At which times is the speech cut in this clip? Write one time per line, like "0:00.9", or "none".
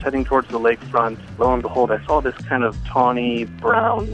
0:01.2
0:02.8